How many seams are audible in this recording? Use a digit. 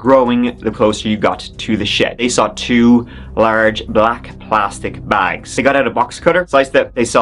2